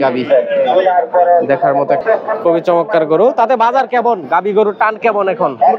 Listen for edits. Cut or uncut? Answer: cut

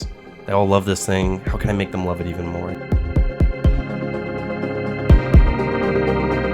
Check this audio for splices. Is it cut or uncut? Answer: cut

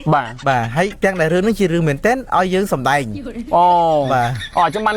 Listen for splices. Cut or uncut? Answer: cut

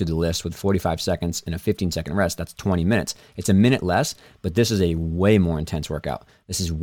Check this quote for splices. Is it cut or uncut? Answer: uncut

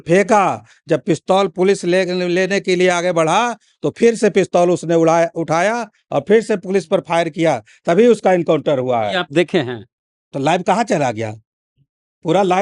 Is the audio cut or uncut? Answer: uncut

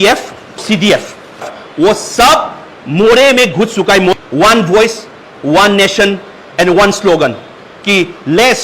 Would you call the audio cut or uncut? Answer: cut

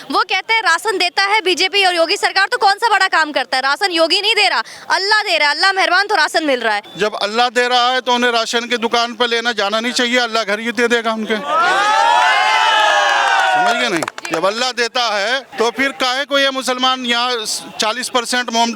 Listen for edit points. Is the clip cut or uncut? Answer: cut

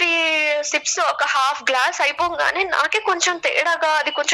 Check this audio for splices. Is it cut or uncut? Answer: uncut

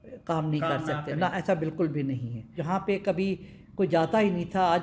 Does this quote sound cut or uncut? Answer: cut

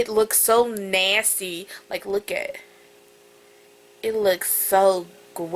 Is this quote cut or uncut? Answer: uncut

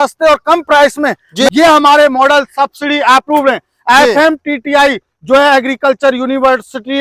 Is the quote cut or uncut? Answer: cut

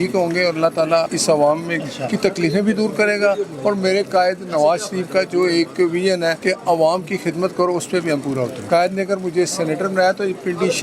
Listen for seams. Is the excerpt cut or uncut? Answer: cut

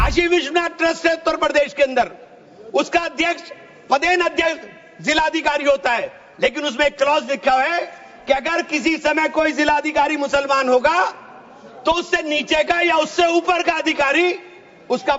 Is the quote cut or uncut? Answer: uncut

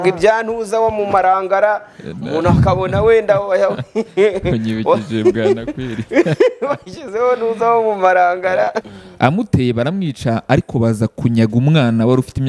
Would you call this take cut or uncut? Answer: cut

